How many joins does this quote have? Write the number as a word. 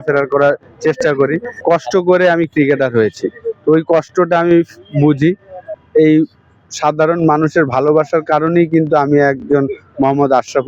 two